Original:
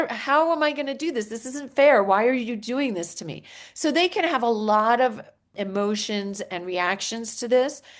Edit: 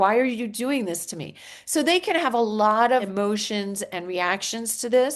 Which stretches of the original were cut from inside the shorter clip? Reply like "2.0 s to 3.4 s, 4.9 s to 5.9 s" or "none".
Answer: 5.2 s to 5.7 s